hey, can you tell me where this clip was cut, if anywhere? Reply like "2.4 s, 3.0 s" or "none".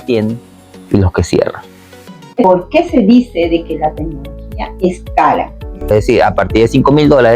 2.4 s, 5.9 s